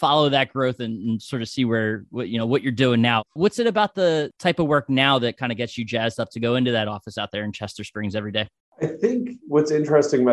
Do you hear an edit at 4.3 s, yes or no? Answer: yes